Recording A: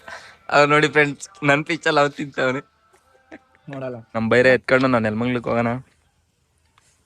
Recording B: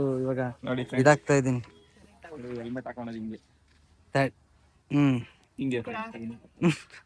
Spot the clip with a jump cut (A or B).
A